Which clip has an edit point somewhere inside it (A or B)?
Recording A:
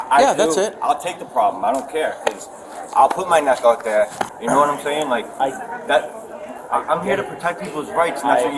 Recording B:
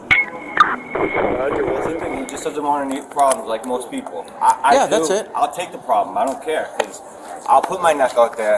B